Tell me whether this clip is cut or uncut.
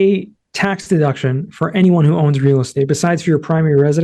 uncut